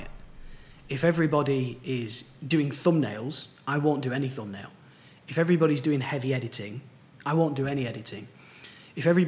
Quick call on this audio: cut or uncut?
uncut